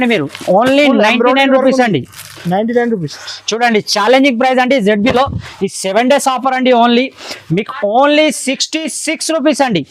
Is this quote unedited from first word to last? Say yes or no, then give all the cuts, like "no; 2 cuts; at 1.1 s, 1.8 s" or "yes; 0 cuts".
no; 1 cut; at 3.2 s